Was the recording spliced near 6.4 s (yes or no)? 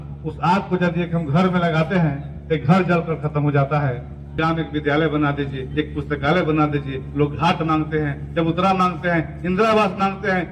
no